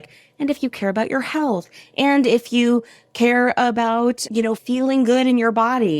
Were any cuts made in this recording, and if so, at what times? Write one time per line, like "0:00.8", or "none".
0:04.6